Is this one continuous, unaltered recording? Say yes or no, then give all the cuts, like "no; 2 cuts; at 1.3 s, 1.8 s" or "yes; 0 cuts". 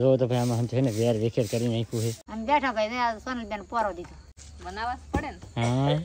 no; 2 cuts; at 2.3 s, 4.4 s